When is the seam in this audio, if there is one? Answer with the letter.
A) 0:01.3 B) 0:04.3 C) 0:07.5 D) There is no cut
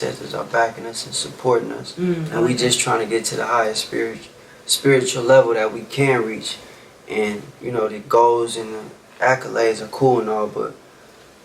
D